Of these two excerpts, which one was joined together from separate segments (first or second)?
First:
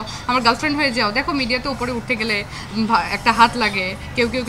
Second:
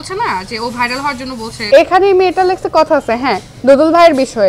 second